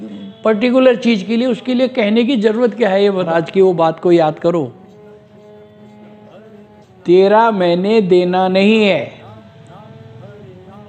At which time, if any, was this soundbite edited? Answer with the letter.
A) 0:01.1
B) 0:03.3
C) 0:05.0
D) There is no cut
B